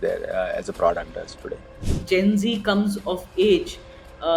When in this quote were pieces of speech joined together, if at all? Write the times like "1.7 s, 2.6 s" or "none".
1.9 s